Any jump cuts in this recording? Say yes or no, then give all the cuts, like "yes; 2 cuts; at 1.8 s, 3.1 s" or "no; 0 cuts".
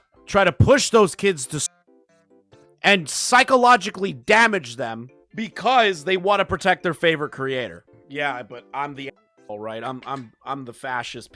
no; 0 cuts